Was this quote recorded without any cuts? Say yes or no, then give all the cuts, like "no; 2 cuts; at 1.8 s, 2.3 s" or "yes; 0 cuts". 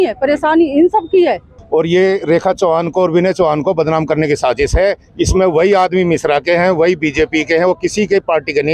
no; 1 cut; at 1.5 s